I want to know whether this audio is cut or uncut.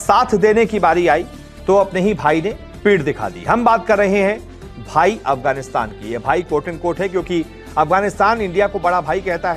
uncut